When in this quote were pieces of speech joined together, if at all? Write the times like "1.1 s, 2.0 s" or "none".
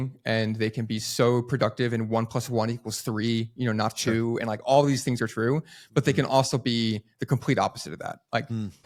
none

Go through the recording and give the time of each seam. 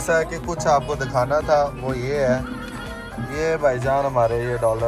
none

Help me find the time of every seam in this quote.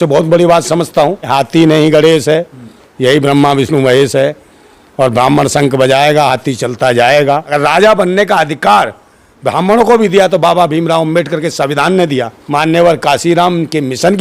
1.2 s, 7.5 s, 12.4 s

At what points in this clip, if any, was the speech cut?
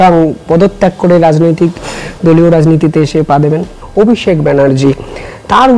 3.8 s

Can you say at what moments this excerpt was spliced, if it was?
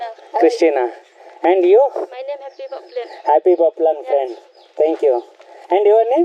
none

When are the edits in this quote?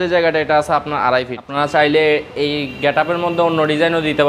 1.4 s

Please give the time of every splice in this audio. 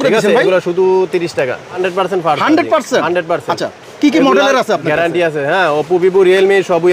1.8 s

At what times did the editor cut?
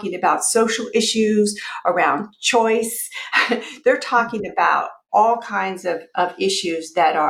5.0 s

